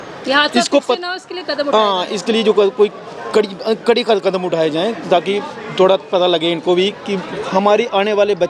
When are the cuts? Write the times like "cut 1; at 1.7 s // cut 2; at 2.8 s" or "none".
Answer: none